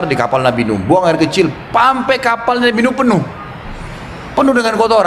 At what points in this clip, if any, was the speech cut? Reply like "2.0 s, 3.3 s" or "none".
none